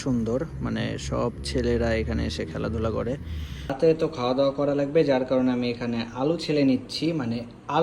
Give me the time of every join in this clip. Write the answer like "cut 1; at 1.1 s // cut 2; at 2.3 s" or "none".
cut 1; at 3.8 s